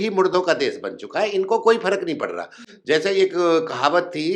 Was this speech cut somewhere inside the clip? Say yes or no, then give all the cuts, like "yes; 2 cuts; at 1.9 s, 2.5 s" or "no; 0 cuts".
no; 0 cuts